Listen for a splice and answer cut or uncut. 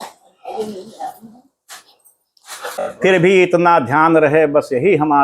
cut